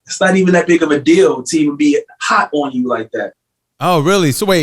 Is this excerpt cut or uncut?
cut